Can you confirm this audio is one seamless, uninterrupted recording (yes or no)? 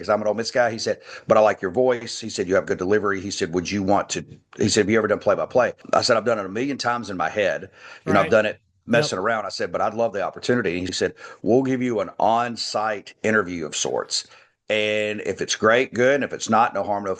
no